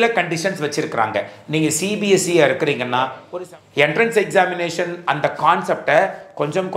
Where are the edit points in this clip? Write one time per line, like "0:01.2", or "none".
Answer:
0:03.2